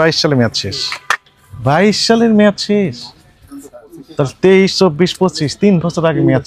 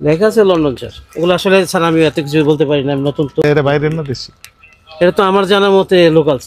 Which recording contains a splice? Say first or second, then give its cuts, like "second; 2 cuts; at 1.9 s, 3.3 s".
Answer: second; 1 cut; at 3.4 s